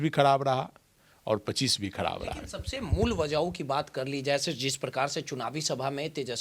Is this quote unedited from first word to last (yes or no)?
yes